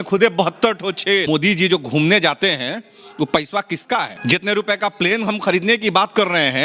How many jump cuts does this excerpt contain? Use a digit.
2